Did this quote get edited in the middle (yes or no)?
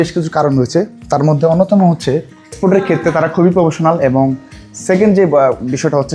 yes